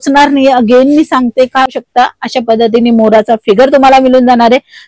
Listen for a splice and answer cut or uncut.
cut